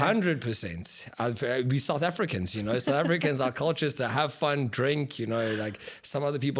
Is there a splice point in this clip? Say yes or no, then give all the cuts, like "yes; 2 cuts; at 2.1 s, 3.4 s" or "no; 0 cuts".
no; 0 cuts